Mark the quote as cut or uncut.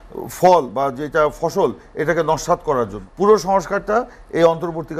cut